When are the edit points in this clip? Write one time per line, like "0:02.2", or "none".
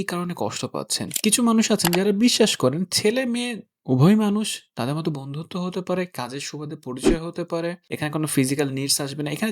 0:01.0